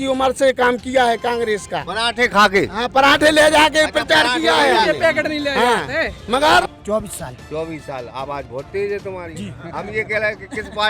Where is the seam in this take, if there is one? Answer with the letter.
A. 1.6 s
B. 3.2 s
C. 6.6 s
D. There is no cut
C